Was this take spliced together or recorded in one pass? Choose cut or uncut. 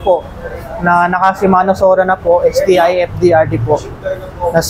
uncut